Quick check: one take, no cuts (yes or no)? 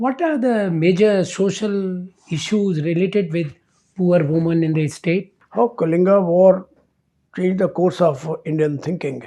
no